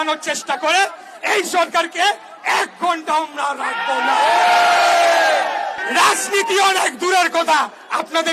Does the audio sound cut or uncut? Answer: cut